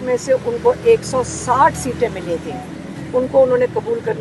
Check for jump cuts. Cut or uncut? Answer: uncut